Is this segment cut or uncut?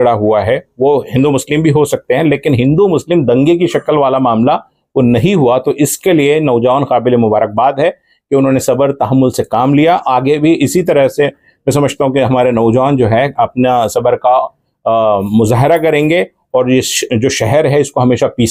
uncut